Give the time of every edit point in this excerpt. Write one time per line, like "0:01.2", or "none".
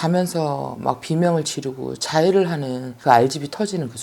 0:02.8